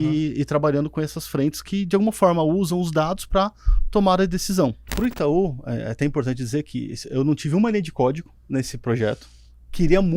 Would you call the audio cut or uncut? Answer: cut